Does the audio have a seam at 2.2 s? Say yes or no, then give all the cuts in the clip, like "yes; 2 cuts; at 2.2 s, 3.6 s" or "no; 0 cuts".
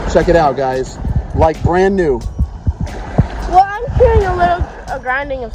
no; 0 cuts